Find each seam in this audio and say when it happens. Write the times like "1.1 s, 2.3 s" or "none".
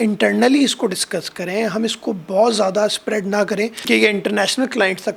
none